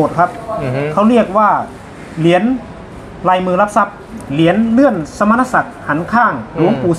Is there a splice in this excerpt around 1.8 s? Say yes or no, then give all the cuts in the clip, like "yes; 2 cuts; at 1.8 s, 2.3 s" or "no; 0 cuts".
no; 1 cut; at 4.1 s